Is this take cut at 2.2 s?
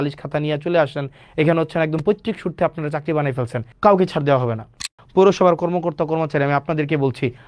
no; 2 cuts; at 3.6 s, 4.8 s

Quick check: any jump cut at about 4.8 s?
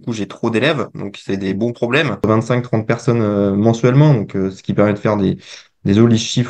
no; 1 cut; at 2.3 s

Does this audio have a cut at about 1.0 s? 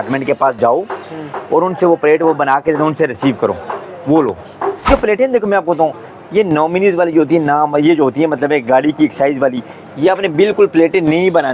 no; 1 cut; at 4.9 s

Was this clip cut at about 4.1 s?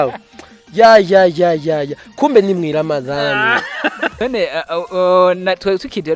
yes; 1 cut; at 4.1 s

